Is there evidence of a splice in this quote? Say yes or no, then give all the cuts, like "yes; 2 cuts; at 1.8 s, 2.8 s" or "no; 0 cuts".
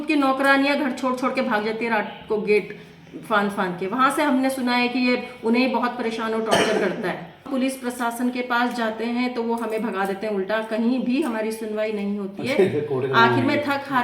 yes; 1 cut; at 7.5 s